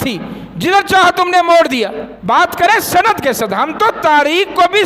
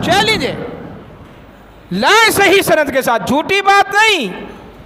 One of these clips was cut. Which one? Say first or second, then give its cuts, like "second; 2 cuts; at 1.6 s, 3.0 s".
first; 1 cut; at 2.1 s